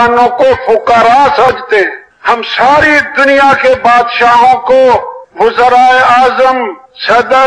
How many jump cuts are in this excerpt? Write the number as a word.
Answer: one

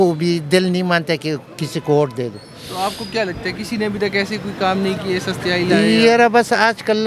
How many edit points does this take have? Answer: zero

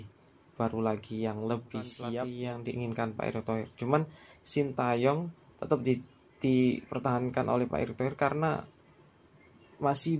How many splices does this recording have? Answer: one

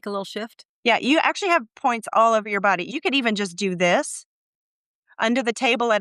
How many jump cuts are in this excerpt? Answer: one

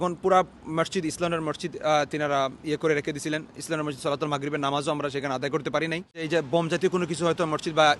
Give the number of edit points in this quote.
one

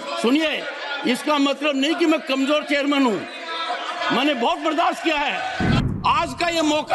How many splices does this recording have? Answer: one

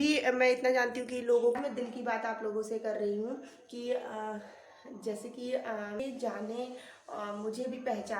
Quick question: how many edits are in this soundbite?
two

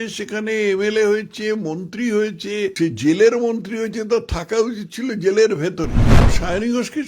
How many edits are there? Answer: two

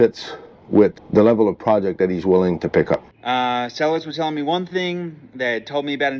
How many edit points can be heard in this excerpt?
two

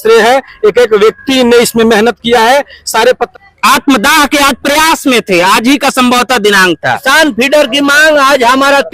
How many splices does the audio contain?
two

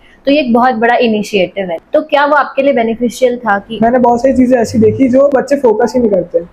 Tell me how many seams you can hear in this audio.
three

